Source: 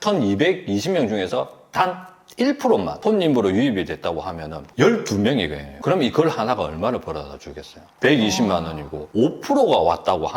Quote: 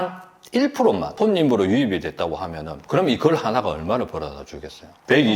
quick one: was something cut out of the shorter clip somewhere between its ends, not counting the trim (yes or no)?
yes